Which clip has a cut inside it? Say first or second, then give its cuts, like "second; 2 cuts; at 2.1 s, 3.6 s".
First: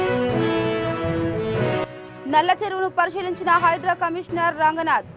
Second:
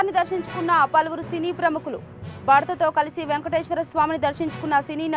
first; 1 cut; at 1.9 s